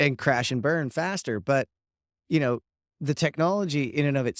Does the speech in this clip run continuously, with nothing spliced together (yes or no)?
yes